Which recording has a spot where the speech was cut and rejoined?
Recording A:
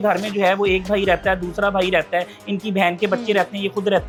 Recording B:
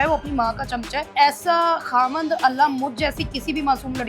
B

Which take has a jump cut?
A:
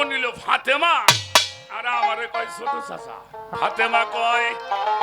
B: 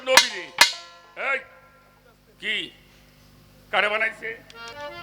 A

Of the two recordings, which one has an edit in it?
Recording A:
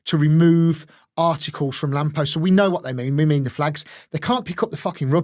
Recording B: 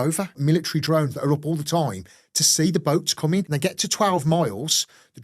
B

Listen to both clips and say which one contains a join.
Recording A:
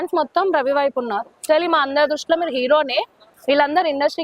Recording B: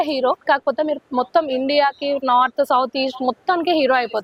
A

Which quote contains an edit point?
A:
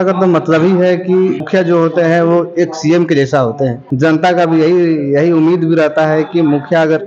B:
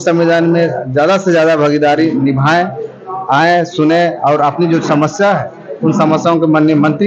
A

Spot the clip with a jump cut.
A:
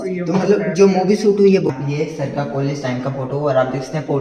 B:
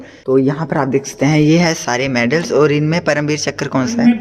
A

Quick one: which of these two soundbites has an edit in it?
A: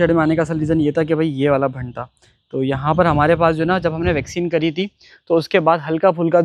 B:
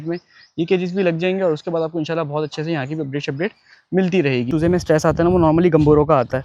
B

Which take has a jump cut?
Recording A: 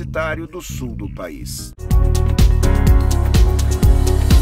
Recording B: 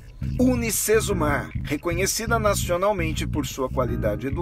A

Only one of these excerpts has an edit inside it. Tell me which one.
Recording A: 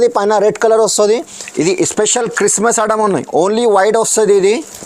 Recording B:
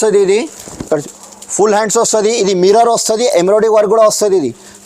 A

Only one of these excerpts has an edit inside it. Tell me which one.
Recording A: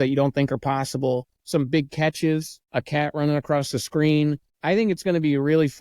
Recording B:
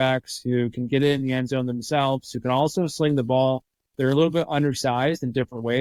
A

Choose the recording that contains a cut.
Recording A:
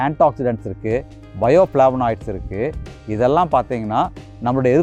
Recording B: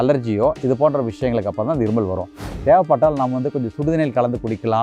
B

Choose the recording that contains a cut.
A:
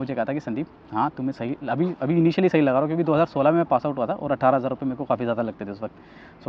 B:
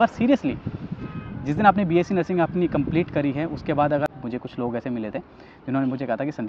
B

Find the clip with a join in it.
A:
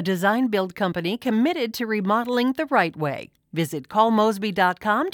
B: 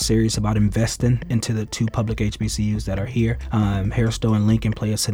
B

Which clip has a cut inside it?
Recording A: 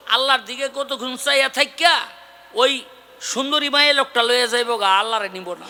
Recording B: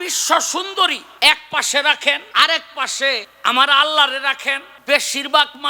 B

